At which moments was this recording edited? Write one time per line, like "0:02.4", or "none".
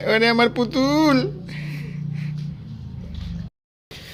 none